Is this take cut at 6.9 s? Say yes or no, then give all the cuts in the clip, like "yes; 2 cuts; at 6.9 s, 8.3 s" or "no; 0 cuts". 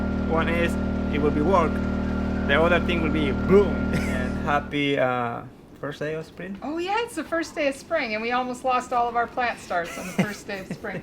no; 1 cut; at 4.4 s